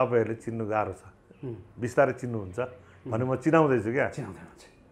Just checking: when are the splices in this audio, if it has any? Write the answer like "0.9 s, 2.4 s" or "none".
none